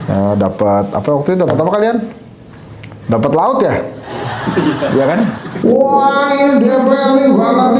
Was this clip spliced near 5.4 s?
yes; 1 cut; at 5.4 s

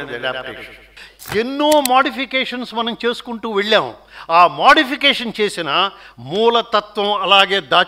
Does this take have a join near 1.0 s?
yes; 1 cut; at 1.0 s

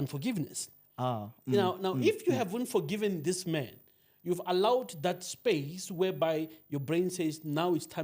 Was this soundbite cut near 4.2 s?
no; 0 cuts

